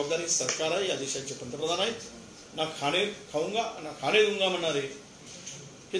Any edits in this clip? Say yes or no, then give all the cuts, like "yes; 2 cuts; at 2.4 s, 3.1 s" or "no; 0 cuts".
no; 0 cuts